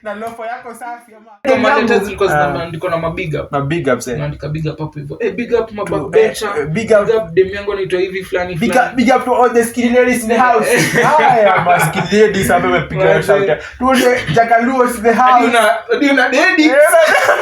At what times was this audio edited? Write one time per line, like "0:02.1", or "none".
0:01.4